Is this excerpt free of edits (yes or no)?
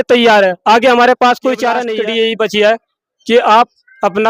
no